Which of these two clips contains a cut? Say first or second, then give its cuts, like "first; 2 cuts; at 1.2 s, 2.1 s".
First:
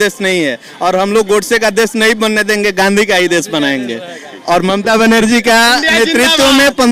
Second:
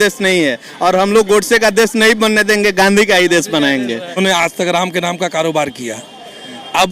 second; 1 cut; at 4.2 s